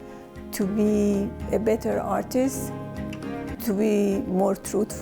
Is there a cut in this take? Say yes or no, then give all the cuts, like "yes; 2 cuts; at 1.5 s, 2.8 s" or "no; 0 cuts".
yes; 1 cut; at 3.5 s